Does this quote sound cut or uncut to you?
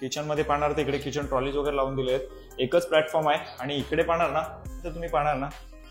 cut